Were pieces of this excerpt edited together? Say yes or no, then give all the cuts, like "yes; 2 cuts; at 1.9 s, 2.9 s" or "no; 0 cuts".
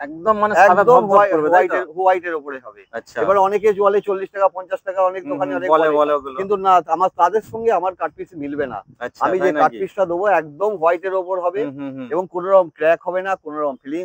no; 0 cuts